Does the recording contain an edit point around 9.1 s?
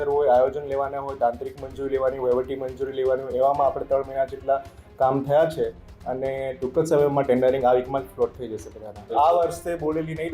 yes; 1 cut; at 9.1 s

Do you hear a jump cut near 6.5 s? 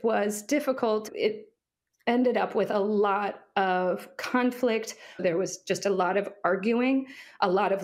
no; 2 cuts; at 1.0 s, 5.2 s

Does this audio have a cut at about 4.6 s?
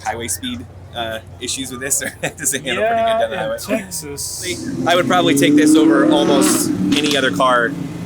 yes; 1 cut; at 4.6 s

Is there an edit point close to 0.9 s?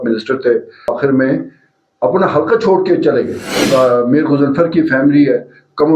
yes; 2 cuts; at 0.9 s, 3.6 s

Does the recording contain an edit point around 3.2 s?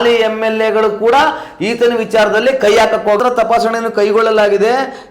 yes; 1 cut; at 3.2 s

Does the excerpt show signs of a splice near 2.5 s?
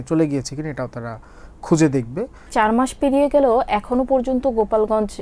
yes; 1 cut; at 2.5 s

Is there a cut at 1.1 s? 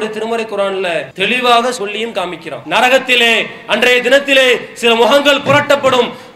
yes; 2 cuts; at 1.1 s, 2.6 s

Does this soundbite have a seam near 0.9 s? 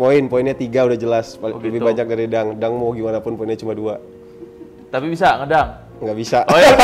no; 0 cuts

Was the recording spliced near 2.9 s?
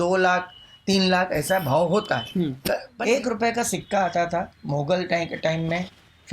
yes; 1 cut; at 2.9 s

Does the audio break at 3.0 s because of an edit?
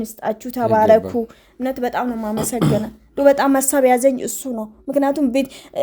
no; 0 cuts

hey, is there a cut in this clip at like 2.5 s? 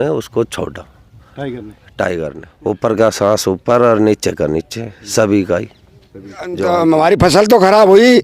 yes; 2 cuts; at 2.5 s, 6.6 s

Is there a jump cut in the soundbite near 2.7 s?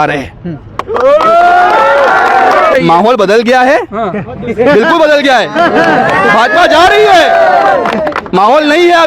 yes; 1 cut; at 2.7 s

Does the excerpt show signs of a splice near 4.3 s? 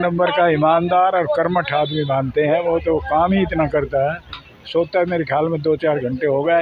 no; 0 cuts

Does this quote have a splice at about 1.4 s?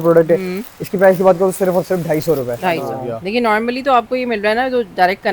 no; 1 cut; at 2.9 s

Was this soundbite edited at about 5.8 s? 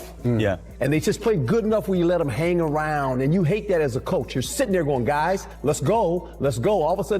yes; 1 cut; at 5.8 s

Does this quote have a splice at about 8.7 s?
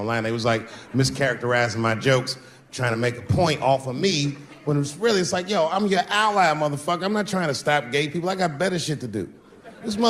no; 0 cuts

